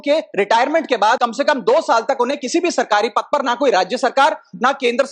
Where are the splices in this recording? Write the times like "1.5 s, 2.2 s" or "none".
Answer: 1.2 s